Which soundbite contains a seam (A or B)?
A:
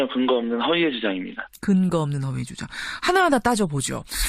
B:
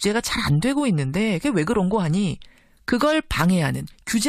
A